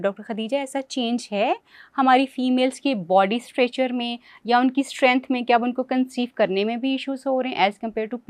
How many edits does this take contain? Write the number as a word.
zero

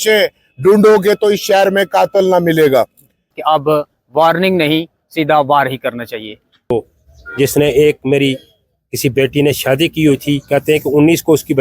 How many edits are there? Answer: two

